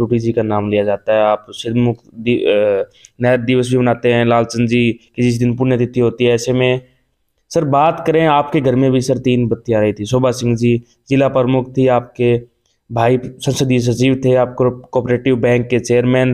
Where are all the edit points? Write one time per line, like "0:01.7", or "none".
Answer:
none